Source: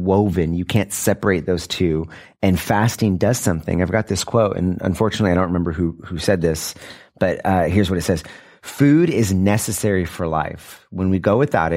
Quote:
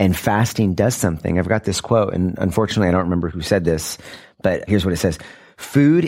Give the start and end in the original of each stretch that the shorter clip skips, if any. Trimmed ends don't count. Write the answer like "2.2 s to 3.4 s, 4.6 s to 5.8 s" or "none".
5.7 s to 6.1 s, 7.4 s to 7.7 s